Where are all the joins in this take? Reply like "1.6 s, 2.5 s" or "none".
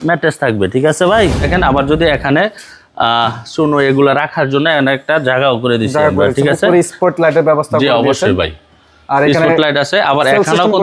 1.4 s